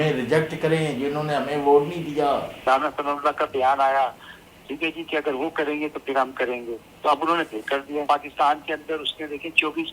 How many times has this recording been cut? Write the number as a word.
two